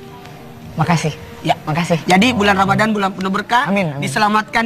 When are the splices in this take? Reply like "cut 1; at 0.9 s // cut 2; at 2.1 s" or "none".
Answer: none

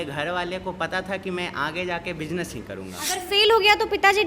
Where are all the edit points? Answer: cut 1; at 3.0 s

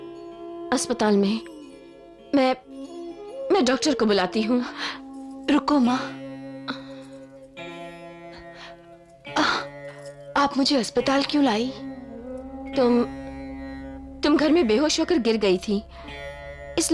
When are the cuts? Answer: none

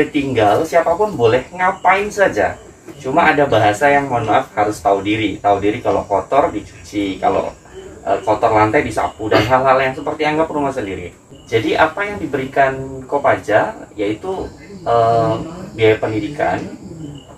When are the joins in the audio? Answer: none

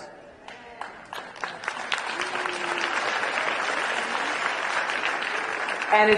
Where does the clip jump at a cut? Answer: cut 1; at 4.4 s

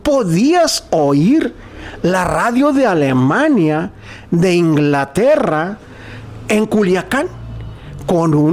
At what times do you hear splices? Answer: none

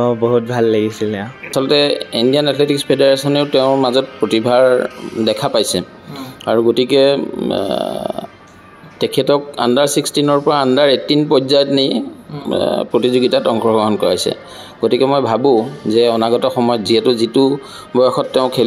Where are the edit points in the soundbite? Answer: cut 1; at 1.4 s

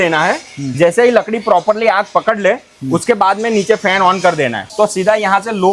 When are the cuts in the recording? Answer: cut 1; at 4.6 s

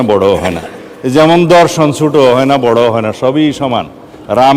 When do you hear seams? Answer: none

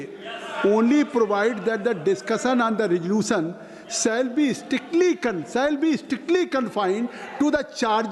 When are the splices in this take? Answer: none

